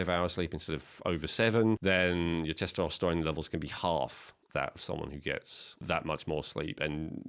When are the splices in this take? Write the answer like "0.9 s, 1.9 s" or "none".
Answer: 1.8 s, 5.8 s